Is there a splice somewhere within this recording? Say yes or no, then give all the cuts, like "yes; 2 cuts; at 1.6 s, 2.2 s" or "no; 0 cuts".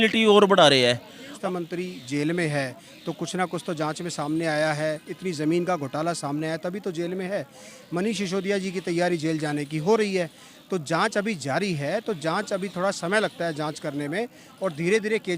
yes; 1 cut; at 1.2 s